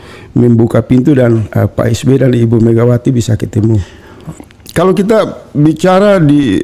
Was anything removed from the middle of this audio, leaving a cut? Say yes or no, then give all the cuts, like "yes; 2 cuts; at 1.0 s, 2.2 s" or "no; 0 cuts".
no; 0 cuts